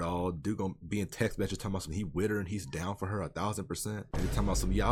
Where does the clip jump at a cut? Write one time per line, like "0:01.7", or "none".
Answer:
none

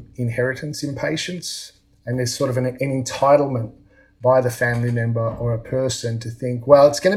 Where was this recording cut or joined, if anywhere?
0:02.8

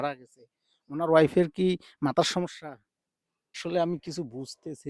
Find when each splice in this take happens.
0:03.6

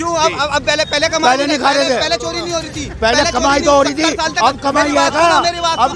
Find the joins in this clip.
none

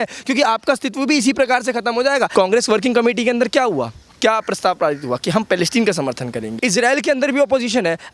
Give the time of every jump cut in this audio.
0:02.3
0:06.5

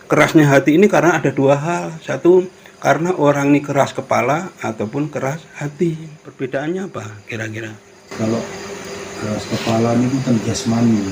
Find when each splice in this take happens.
0:06.2

